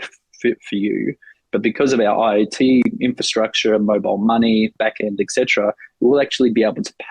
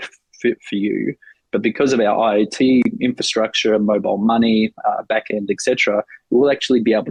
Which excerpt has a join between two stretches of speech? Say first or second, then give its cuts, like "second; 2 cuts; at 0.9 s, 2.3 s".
first; 1 cut; at 4.7 s